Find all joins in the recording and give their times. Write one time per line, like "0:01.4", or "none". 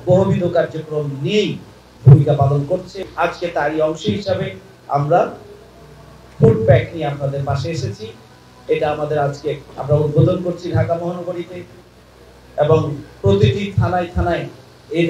0:03.1